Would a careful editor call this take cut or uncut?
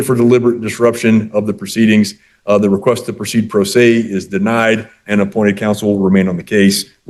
uncut